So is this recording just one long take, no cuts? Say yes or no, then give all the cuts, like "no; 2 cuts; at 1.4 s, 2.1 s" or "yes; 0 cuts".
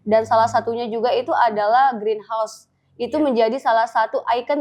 yes; 0 cuts